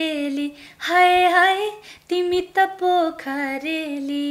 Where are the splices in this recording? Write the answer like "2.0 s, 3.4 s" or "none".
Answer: none